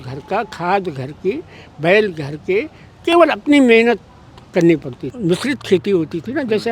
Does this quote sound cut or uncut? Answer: cut